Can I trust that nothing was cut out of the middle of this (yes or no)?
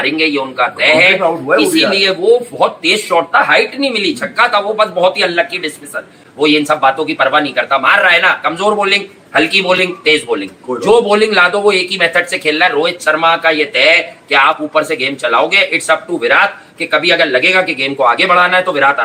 yes